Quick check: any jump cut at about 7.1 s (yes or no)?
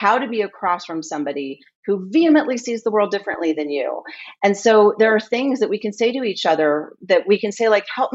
no